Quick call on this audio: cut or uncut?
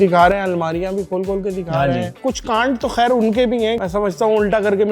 cut